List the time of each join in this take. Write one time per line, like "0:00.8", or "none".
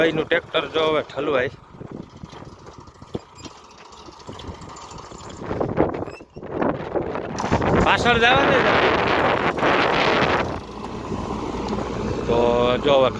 0:10.8